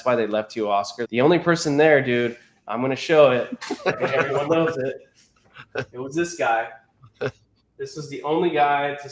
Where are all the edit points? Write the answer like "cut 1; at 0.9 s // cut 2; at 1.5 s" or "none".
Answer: cut 1; at 1.0 s